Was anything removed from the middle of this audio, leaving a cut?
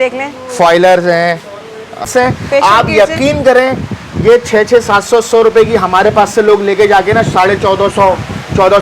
yes; 1 cut; at 2.0 s

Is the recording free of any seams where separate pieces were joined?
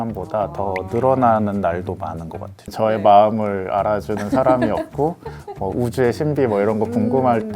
no; 1 cut; at 2.7 s

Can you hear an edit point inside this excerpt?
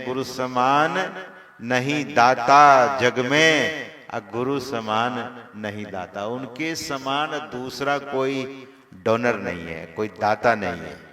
no; 0 cuts

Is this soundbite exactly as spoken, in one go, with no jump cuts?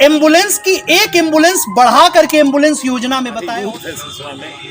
no; 1 cut; at 3.4 s

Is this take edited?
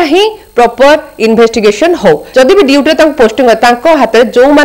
yes; 1 cut; at 2.2 s

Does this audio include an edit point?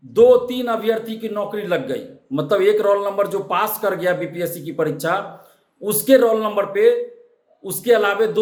no; 0 cuts

